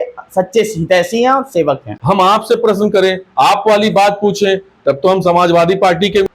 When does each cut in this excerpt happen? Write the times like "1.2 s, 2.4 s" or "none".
1.9 s